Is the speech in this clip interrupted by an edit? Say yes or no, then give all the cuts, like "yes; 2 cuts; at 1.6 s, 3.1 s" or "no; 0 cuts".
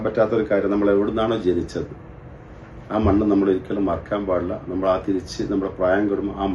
no; 0 cuts